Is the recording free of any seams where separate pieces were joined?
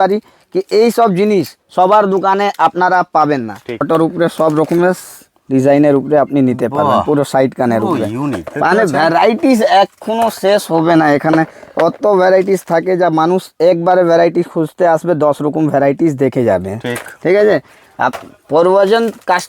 no; 1 cut; at 3.8 s

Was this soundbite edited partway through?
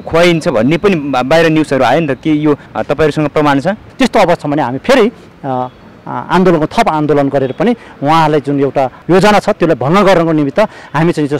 yes; 1 cut; at 3.9 s

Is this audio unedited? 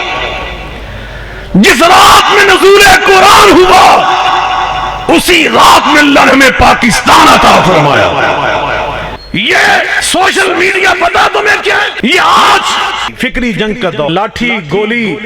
no; 5 cuts; at 9.1 s, 10.0 s, 11.9 s, 13.1 s, 14.1 s

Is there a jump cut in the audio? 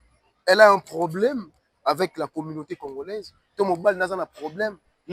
no; 0 cuts

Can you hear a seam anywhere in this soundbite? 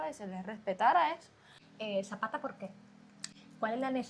yes; 1 cut; at 1.7 s

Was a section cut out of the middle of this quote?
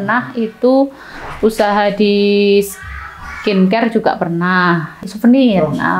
yes; 1 cut; at 5.1 s

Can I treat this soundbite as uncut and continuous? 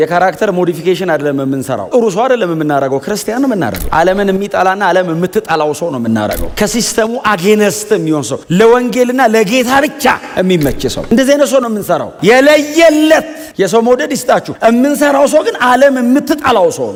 yes; 0 cuts

